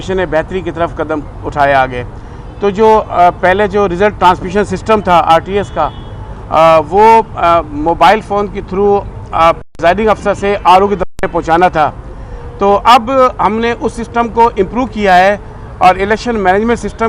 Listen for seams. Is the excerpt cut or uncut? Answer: uncut